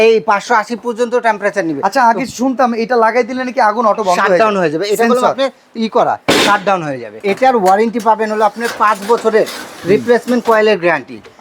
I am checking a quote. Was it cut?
yes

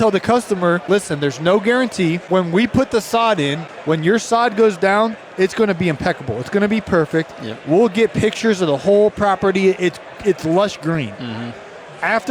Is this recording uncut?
no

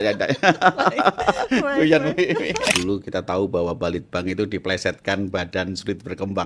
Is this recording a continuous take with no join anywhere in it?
no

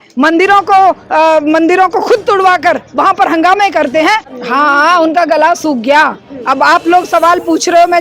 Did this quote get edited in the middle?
yes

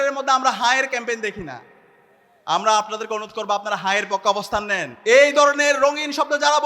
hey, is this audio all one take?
no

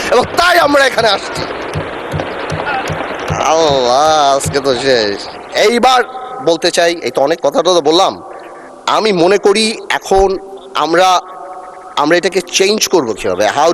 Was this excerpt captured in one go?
yes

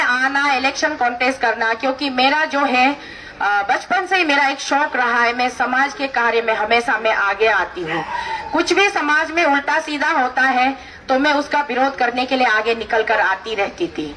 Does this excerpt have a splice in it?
no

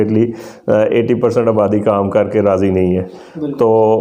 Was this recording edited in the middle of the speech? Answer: no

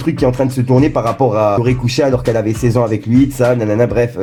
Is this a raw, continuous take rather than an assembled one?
yes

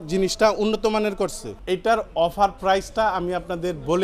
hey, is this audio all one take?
no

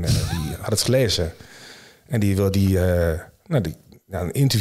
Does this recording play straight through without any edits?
yes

